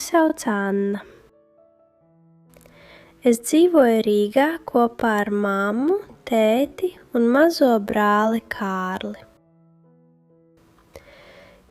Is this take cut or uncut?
cut